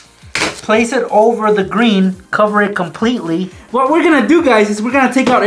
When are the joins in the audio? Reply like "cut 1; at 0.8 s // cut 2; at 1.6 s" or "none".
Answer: cut 1; at 3.6 s